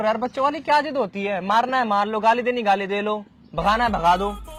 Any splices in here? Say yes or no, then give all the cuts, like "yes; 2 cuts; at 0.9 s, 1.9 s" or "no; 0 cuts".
no; 0 cuts